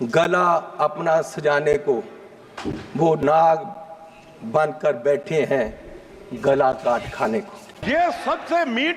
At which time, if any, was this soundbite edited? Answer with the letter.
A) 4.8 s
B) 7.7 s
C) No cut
B